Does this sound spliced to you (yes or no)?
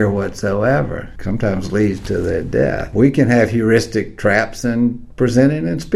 yes